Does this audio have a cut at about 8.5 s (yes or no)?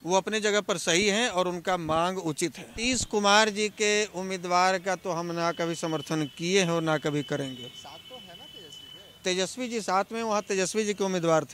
no